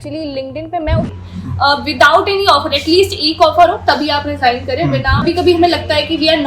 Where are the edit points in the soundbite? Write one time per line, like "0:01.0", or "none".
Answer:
0:01.1
0:05.2